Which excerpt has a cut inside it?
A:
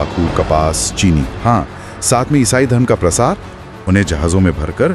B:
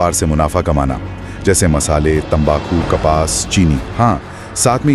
A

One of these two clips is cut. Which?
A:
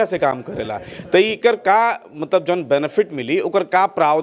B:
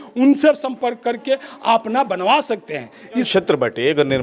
B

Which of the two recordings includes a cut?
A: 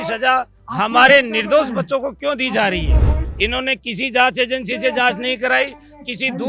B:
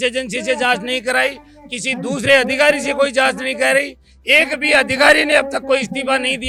A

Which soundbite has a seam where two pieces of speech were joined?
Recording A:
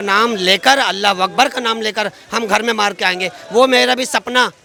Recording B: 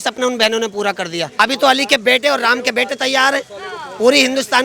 B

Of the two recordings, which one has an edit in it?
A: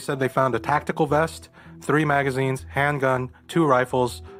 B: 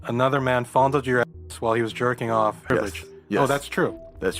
B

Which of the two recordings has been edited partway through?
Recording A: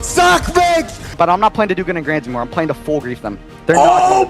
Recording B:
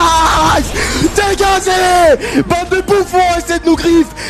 A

